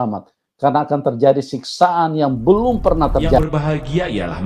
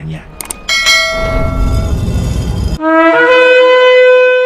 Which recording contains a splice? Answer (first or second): first